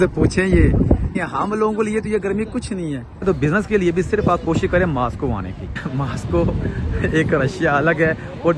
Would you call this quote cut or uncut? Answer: cut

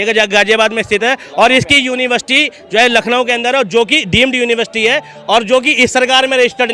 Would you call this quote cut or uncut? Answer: uncut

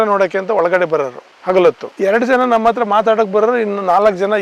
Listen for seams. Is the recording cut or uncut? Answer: uncut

